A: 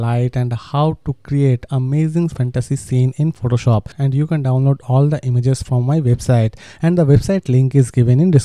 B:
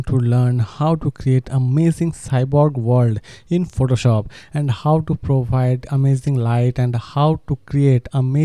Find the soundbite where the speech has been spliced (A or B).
A